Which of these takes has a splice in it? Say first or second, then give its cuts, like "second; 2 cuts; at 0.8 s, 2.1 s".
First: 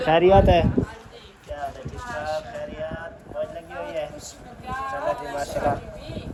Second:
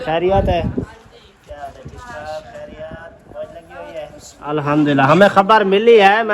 second; 1 cut; at 4.6 s